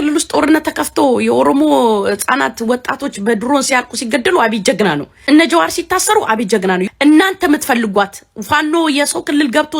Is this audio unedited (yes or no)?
no